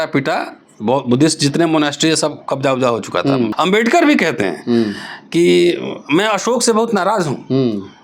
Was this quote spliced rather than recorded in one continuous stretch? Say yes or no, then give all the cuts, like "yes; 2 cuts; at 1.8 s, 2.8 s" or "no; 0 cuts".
yes; 1 cut; at 3.5 s